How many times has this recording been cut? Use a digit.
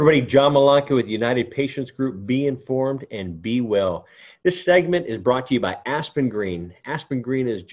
0